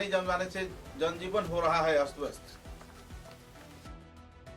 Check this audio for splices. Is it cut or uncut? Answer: uncut